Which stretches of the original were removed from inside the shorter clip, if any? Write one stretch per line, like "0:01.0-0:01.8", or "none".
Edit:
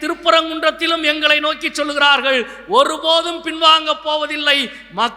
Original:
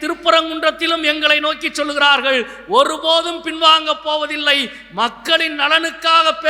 none